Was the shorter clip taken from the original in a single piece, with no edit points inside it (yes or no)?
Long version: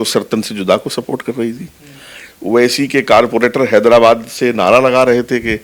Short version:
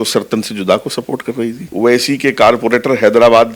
no